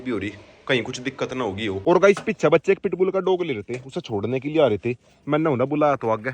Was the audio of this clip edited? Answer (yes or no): yes